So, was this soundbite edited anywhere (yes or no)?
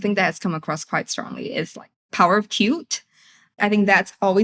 yes